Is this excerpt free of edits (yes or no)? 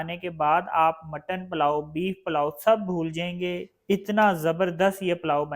no